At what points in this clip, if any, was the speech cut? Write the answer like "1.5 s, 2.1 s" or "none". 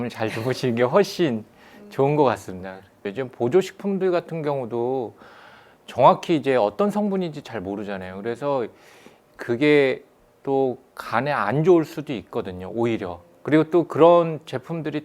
3.0 s